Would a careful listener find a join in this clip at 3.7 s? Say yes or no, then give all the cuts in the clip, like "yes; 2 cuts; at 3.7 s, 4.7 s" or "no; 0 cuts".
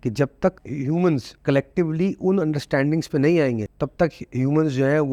yes; 1 cut; at 3.7 s